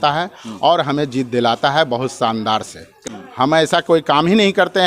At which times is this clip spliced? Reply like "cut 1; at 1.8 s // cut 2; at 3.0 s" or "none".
cut 1; at 3.0 s